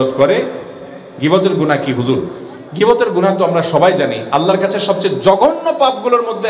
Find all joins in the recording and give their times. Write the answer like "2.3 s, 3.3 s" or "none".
none